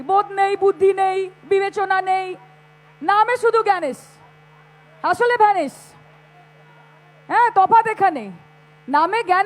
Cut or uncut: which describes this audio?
uncut